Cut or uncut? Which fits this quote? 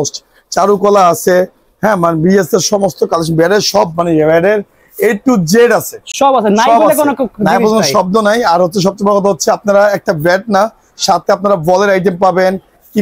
uncut